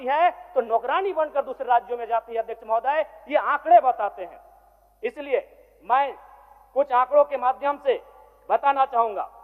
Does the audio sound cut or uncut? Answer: uncut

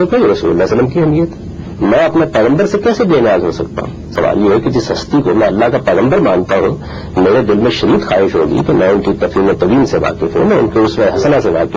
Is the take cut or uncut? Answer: uncut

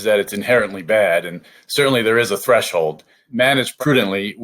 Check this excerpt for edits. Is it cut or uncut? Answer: cut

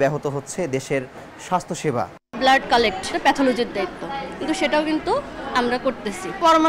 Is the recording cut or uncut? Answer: cut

